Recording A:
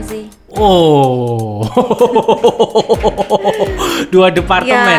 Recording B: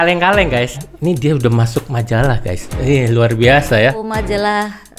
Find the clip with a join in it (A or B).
B